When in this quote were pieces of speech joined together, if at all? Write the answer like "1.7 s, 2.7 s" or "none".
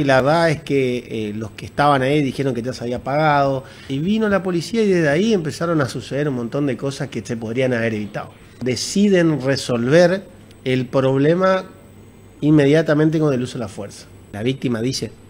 3.9 s, 8.6 s, 14.3 s

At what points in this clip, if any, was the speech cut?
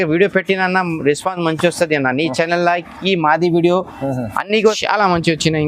4.8 s

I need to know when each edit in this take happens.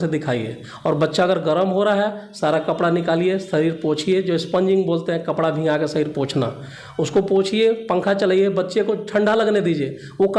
none

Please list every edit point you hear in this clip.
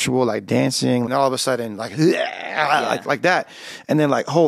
1.1 s

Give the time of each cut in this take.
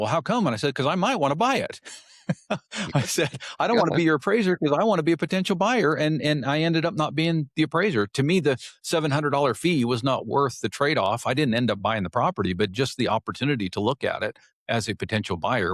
none

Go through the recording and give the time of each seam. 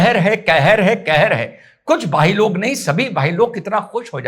none

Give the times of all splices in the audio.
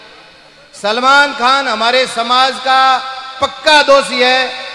none

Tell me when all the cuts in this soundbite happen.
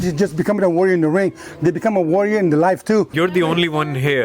3.1 s

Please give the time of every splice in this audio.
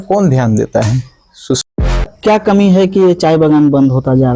2.0 s

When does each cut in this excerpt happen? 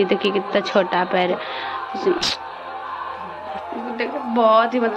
3.5 s

